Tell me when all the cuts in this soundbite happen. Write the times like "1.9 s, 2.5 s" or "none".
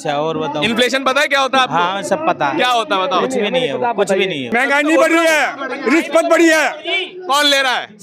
4.4 s